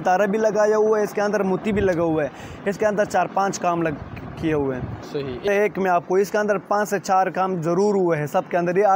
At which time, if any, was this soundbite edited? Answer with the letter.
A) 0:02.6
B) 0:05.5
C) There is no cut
B